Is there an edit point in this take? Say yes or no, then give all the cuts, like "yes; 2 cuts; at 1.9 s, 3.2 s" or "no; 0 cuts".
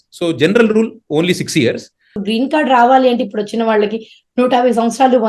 yes; 1 cut; at 2.2 s